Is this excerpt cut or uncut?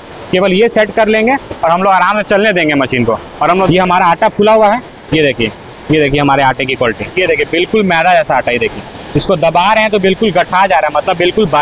cut